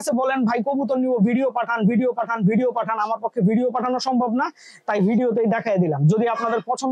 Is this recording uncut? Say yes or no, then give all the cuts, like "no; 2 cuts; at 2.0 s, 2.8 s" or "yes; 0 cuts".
yes; 0 cuts